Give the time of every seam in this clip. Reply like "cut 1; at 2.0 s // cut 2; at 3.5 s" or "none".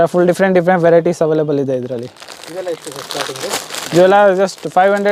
none